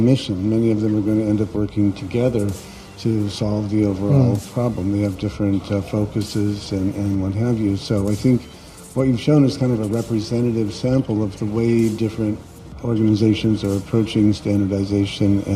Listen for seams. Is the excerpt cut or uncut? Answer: uncut